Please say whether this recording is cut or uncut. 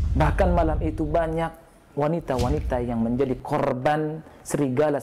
uncut